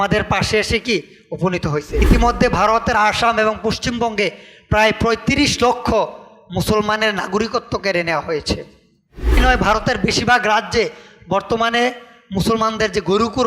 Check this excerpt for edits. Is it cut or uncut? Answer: cut